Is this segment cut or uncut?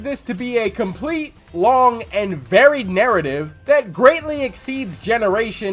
uncut